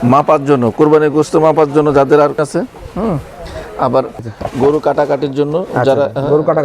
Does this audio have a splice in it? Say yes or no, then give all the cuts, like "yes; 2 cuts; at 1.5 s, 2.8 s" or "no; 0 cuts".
yes; 2 cuts; at 2.4 s, 4.2 s